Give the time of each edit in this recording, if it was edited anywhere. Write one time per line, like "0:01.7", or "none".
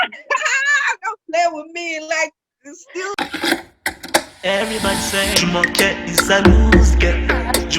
0:03.1